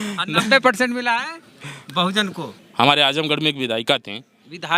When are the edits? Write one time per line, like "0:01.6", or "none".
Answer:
0:02.6